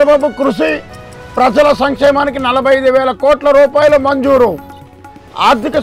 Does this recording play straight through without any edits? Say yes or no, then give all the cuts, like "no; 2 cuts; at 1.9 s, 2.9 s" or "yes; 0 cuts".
yes; 0 cuts